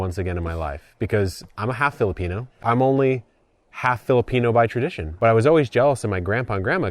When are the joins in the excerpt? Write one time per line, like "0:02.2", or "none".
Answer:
0:02.6
0:05.0